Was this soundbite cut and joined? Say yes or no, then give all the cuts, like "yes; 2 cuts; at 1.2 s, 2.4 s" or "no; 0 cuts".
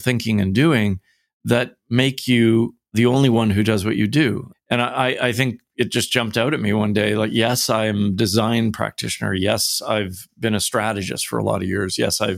yes; 2 cuts; at 2.9 s, 4.5 s